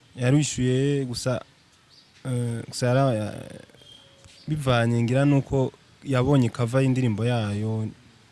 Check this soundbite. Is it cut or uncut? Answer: uncut